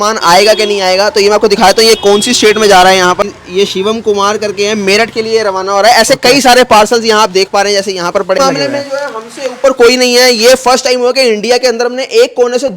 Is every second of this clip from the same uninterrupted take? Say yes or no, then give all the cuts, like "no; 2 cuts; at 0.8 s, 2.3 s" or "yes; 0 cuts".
no; 2 cuts; at 3.2 s, 8.4 s